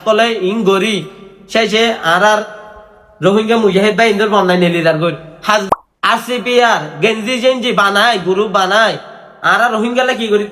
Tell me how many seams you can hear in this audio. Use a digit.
1